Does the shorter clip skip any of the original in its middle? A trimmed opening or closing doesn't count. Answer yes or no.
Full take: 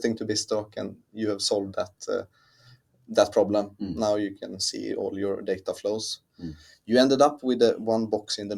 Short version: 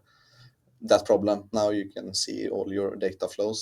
yes